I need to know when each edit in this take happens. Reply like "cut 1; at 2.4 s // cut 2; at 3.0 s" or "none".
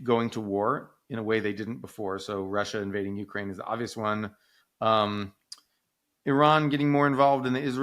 none